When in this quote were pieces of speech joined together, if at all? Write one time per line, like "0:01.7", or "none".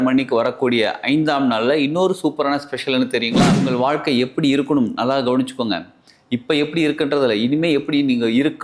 0:03.6